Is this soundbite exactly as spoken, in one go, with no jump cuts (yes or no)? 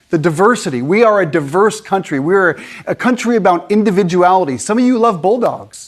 no